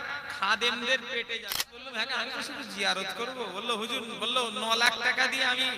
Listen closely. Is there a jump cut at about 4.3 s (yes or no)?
no